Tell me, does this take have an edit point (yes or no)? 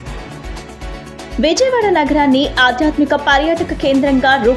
no